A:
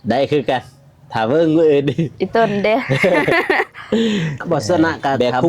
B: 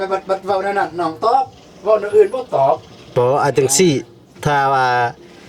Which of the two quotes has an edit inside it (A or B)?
A